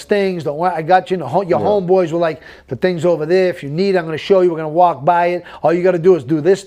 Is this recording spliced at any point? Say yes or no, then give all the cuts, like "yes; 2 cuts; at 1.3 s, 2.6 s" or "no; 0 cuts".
no; 0 cuts